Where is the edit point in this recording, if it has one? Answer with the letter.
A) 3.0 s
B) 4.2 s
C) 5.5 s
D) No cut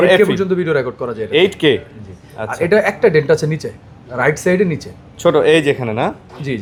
D